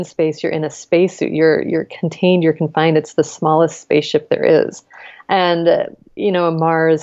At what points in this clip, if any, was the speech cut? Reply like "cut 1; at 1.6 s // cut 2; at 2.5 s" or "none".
cut 1; at 6.1 s

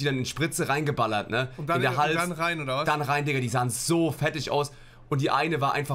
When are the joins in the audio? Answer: none

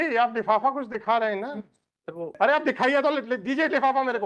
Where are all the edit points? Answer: cut 1; at 2.4 s

